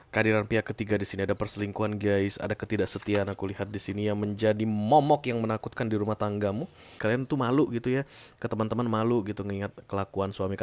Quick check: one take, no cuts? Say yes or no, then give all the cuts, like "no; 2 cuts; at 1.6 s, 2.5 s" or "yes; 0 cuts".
no; 1 cut; at 6.9 s